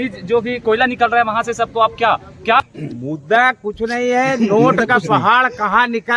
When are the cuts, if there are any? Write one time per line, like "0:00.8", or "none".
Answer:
0:02.6